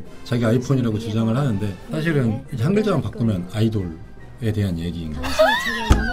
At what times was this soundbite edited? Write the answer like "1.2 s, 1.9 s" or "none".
1.8 s